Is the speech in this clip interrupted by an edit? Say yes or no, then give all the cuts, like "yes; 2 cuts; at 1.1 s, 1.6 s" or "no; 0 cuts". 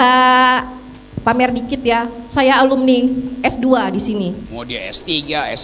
yes; 1 cut; at 4.5 s